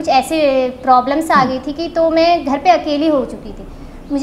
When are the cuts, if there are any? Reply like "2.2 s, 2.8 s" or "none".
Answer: none